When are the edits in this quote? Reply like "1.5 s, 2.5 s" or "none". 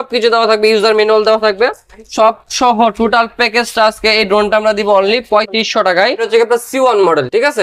6.2 s